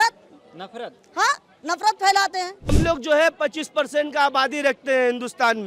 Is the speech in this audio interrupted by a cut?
yes; 1 cut; at 2.7 s

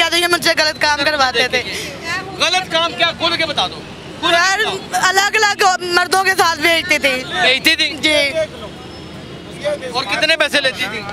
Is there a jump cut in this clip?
no; 0 cuts

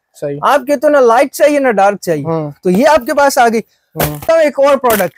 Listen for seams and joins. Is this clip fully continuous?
no; 1 cut; at 4.2 s

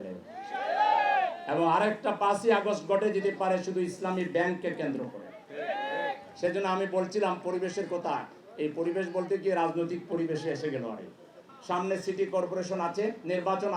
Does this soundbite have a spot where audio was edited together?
no; 0 cuts

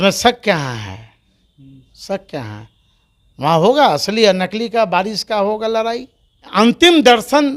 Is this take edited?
yes; 1 cut; at 6.5 s

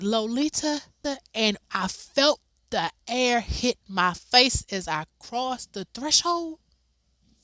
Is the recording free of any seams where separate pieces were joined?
no; 1 cut; at 1.0 s

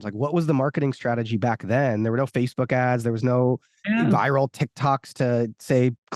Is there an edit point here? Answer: no; 0 cuts

